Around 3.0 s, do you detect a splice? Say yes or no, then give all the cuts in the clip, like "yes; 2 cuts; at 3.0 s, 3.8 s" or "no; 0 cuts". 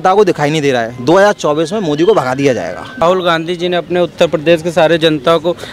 yes; 1 cut; at 3.0 s